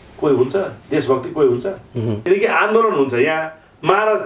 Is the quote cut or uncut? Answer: cut